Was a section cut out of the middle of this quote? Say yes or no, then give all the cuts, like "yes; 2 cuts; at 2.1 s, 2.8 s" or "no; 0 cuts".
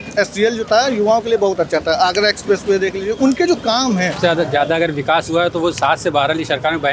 yes; 1 cut; at 4.2 s